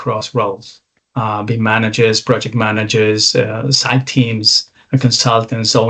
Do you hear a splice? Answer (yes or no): no